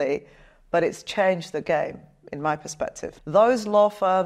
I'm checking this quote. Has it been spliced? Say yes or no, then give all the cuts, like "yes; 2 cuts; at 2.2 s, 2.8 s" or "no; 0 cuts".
yes; 1 cut; at 3.1 s